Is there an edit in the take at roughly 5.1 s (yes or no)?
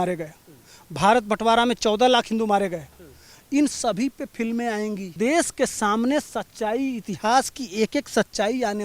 yes